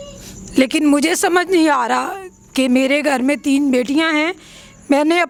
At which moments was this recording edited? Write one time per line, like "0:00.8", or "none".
none